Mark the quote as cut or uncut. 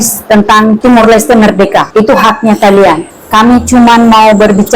cut